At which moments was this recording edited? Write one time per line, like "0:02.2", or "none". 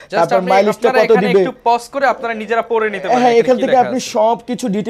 none